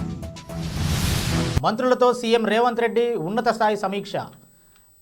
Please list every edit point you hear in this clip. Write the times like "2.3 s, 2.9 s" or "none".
1.6 s